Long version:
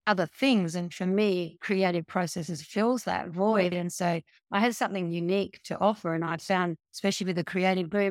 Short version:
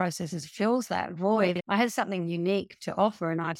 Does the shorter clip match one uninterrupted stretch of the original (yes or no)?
no